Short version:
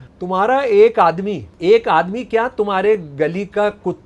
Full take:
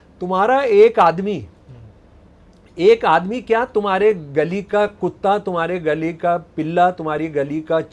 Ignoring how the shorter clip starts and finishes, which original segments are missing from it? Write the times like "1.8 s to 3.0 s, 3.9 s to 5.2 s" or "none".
1.5 s to 2.6 s